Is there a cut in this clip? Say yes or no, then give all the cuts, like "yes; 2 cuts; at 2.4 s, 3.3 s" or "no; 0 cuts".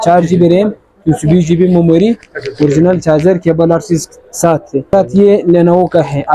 yes; 1 cut; at 4.9 s